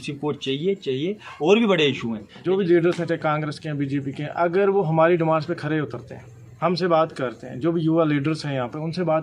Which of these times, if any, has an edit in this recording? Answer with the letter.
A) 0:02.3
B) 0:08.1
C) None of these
A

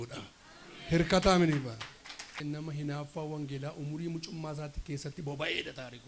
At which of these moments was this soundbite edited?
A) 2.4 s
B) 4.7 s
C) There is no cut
A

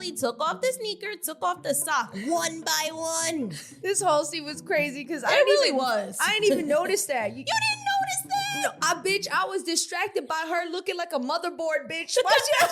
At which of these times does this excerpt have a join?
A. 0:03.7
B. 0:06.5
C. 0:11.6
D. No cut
A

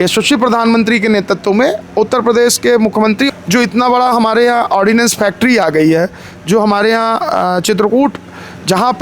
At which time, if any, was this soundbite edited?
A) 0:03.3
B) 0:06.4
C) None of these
A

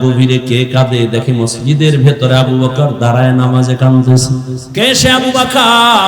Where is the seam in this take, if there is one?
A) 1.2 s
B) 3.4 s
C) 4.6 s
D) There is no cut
C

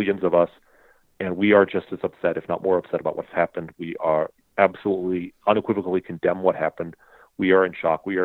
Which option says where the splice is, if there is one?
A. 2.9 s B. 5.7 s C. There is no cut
C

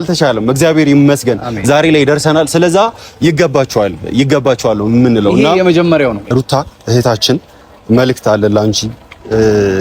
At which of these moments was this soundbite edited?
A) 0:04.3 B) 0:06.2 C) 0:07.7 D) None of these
B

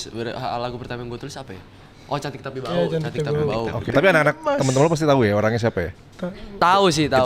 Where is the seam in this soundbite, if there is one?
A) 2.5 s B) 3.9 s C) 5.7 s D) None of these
B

